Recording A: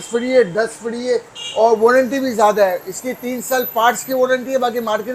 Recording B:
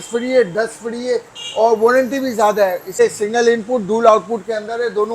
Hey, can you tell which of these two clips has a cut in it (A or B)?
B